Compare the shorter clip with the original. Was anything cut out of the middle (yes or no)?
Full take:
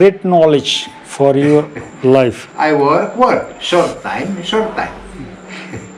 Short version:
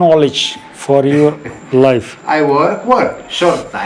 no